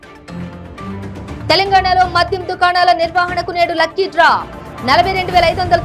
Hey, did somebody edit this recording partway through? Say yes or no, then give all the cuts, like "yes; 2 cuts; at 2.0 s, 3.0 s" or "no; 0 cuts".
yes; 1 cut; at 0.9 s